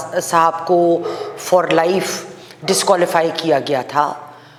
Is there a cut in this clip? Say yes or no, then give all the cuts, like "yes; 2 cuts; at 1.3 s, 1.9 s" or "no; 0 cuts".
no; 0 cuts